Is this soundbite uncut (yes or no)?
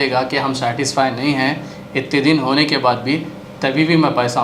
yes